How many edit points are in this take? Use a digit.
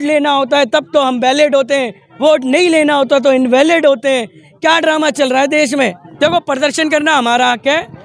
1